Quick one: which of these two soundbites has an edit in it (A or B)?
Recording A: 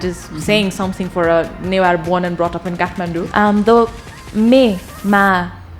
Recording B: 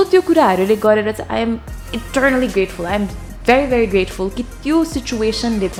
A